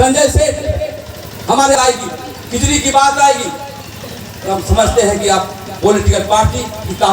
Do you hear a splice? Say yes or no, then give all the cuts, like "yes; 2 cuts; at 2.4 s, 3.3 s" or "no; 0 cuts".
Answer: yes; 1 cut; at 1.8 s